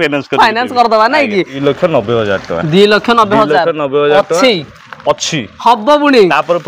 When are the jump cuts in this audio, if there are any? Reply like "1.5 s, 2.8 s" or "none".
1.5 s